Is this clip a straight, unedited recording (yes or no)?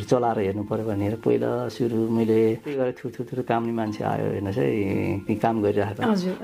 no